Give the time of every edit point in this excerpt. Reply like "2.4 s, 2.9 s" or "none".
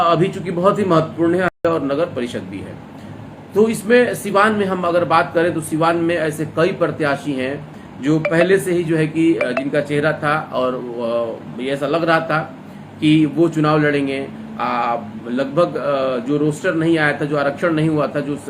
1.5 s

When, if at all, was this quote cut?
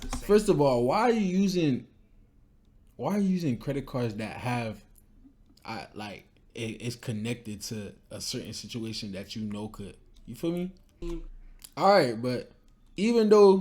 10.9 s

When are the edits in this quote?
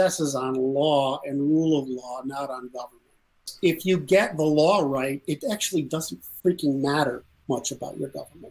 3.5 s

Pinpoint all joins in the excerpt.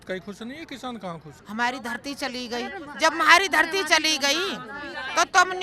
1.3 s

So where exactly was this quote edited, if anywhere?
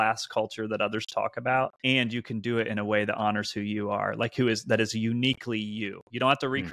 1.8 s

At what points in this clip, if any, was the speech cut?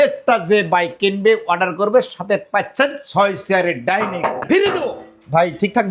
4.4 s

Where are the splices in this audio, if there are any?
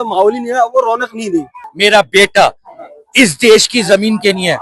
1.6 s

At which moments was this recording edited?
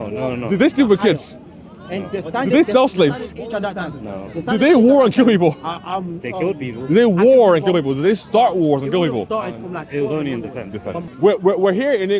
11.1 s

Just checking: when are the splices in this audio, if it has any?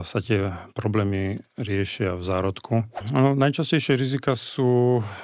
3.0 s

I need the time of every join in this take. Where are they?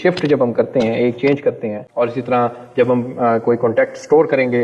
1.8 s

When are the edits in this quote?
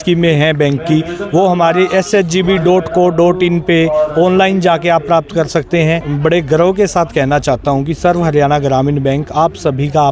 6.1 s

